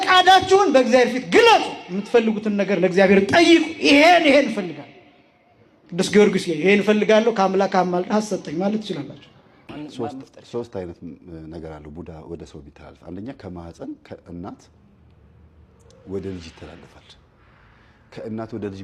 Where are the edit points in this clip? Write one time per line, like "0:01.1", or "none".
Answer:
0:09.6